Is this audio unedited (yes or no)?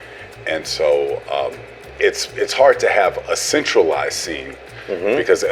yes